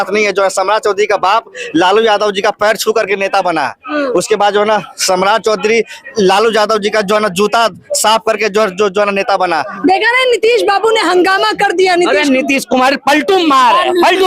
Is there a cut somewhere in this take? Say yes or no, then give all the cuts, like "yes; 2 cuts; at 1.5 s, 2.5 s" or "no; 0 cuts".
yes; 1 cut; at 9.8 s